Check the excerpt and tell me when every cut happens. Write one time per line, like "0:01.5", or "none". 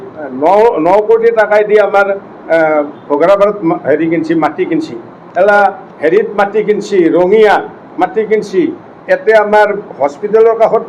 none